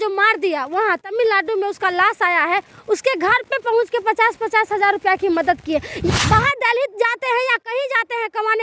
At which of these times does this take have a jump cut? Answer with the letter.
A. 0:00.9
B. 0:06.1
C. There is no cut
B